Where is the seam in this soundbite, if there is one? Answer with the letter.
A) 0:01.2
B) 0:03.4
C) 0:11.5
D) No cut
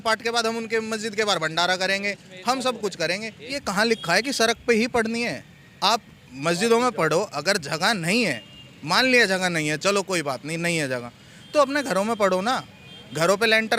B